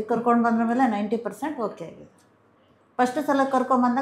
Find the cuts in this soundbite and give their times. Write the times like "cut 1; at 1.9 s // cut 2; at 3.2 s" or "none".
none